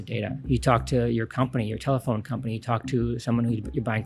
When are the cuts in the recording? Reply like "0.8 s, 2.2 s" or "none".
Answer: none